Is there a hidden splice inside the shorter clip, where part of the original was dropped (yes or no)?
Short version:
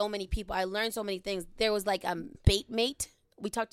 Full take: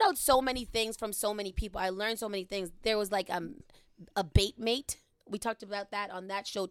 yes